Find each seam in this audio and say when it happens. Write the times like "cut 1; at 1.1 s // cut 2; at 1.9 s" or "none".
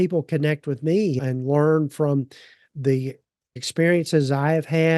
cut 1; at 1.2 s // cut 2; at 3.6 s

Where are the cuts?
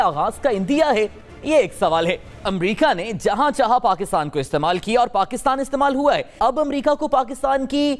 cut 1; at 2.4 s // cut 2; at 6.3 s

